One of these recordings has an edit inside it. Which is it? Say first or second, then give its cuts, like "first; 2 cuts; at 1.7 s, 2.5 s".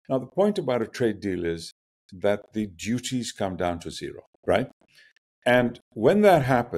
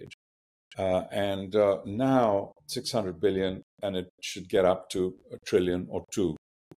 first; 2 cuts; at 4.3 s, 5.9 s